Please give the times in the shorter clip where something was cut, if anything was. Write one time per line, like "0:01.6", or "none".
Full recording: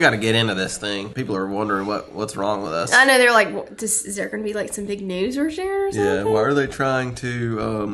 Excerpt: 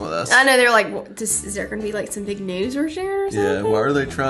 none